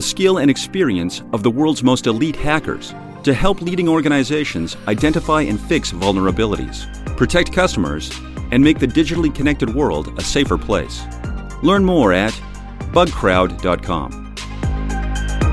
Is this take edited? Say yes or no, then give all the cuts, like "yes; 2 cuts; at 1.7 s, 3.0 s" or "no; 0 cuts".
yes; 1 cut; at 14.3 s